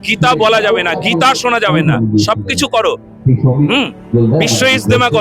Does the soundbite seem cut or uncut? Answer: uncut